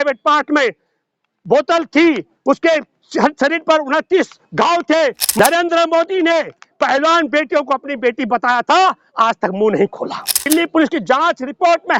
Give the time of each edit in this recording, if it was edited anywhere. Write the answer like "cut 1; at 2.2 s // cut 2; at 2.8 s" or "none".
cut 1; at 5.3 s // cut 2; at 10.4 s